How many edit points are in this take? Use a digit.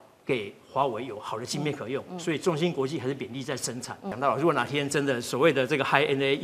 1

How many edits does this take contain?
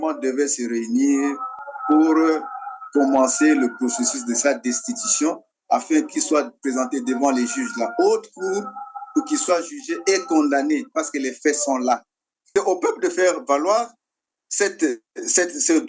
1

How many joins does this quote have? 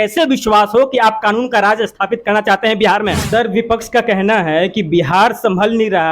1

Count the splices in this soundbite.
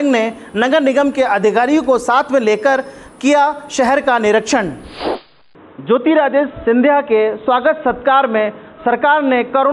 1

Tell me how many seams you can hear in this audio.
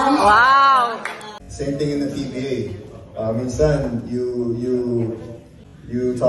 1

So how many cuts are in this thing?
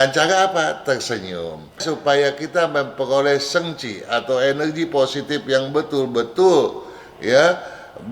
1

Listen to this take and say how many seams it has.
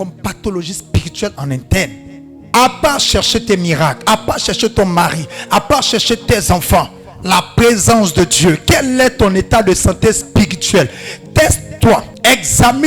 1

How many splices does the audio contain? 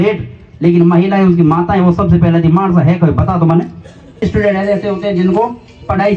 1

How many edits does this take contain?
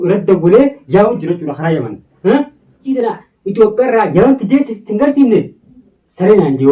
1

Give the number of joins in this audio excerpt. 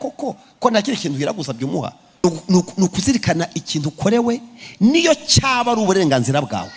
1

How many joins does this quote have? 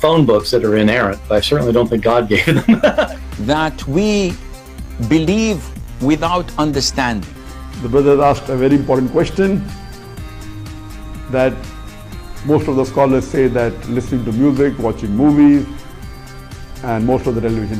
1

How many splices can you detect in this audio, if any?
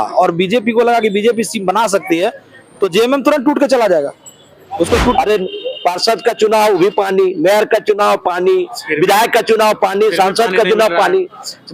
1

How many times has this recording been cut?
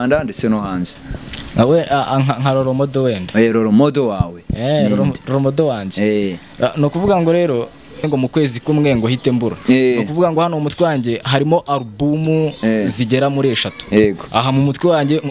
1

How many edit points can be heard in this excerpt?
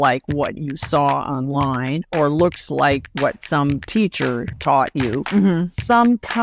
2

